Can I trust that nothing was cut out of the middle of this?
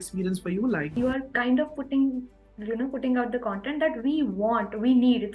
no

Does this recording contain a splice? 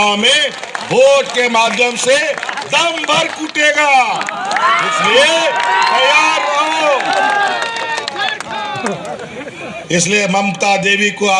no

